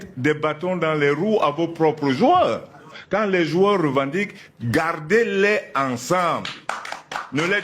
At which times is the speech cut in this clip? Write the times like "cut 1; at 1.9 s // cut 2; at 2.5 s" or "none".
cut 1; at 3.0 s